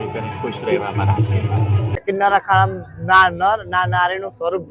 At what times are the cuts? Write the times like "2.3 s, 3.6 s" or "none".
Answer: 1.8 s